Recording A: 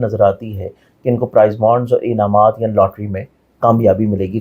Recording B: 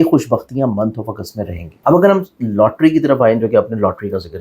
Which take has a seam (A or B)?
B